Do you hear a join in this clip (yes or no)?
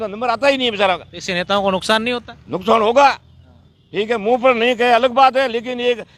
no